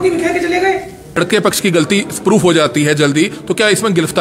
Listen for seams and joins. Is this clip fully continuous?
no; 1 cut; at 1.2 s

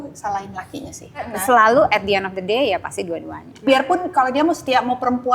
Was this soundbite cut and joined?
yes; 2 cuts; at 1.3 s, 3.7 s

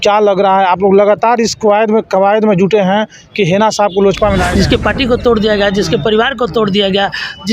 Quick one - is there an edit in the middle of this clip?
yes; 1 cut; at 4.5 s

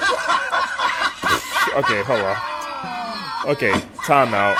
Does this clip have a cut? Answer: no; 0 cuts

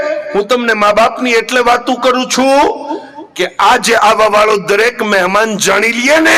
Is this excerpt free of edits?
yes; 0 cuts

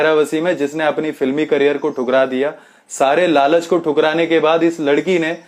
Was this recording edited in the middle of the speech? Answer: no; 0 cuts

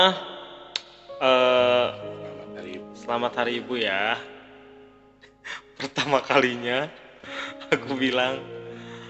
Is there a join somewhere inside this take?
no; 0 cuts

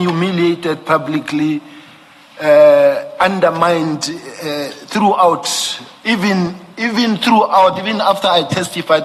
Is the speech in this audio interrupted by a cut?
no; 0 cuts

